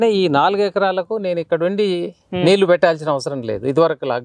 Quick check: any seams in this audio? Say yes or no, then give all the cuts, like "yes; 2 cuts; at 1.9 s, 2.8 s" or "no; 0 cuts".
no; 0 cuts